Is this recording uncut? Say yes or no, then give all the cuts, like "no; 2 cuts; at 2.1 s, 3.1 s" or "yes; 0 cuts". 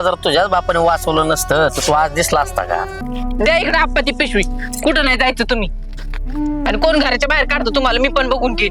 no; 1 cut; at 3.0 s